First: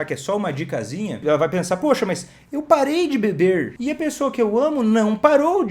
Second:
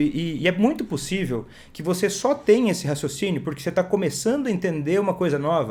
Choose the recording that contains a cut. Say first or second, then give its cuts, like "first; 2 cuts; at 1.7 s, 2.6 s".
first; 2 cuts; at 1.2 s, 3.7 s